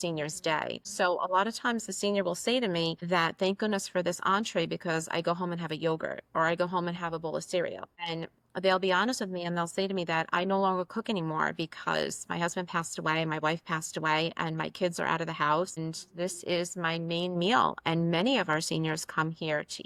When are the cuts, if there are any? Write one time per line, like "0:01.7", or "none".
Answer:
none